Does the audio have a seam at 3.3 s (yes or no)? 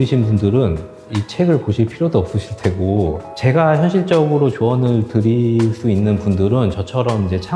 yes